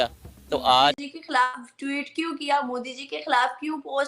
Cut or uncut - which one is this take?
cut